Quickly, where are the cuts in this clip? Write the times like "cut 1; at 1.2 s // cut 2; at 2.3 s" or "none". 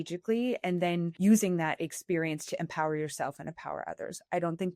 cut 1; at 1.1 s